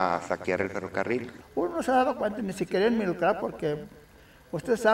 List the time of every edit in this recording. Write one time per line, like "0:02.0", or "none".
0:01.4